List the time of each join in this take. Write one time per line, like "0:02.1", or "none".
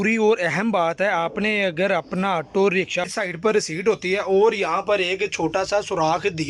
0:03.1